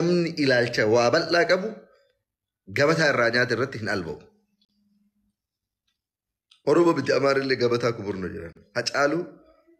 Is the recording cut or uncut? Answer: uncut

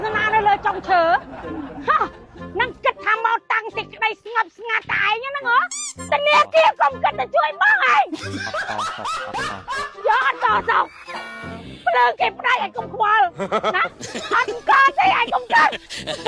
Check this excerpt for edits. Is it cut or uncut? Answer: uncut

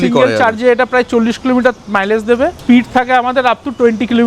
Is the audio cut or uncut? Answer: cut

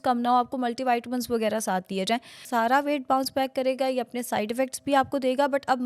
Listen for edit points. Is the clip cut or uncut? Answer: cut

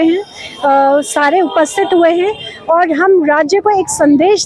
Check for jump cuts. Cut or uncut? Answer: uncut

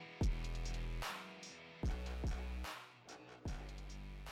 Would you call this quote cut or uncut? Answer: uncut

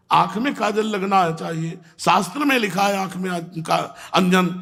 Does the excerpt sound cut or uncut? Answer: uncut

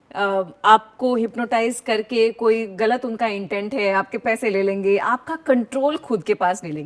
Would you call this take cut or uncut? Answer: uncut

